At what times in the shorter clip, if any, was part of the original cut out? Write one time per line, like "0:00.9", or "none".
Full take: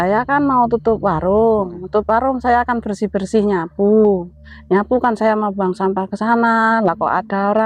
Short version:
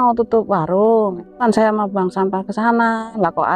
0:01.4